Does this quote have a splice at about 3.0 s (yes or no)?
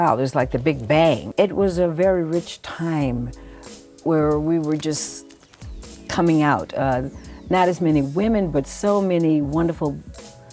no